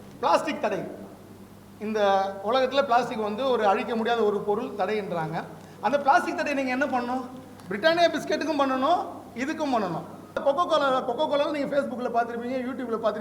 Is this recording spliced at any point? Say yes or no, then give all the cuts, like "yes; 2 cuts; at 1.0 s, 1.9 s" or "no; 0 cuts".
yes; 1 cut; at 10.4 s